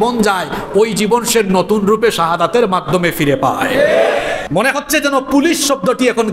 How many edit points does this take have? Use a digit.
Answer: 1